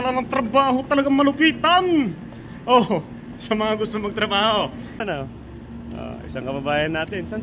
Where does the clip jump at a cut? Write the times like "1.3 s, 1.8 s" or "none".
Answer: 5.0 s